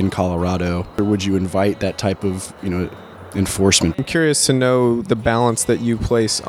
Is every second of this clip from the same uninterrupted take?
no; 2 cuts; at 1.0 s, 4.0 s

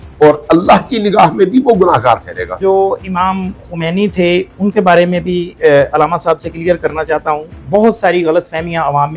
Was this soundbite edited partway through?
yes; 1 cut; at 2.4 s

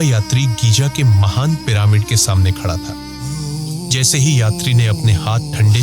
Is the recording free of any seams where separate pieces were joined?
no; 1 cut; at 3.2 s

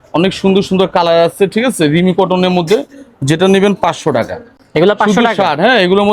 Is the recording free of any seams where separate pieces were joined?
yes; 0 cuts

